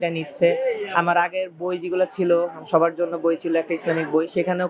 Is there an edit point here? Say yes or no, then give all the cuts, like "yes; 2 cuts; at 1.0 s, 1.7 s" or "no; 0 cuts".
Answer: no; 0 cuts